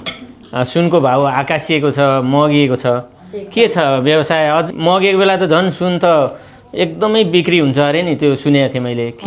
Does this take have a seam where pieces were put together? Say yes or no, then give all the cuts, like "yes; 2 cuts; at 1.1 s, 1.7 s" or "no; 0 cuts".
yes; 1 cut; at 4.7 s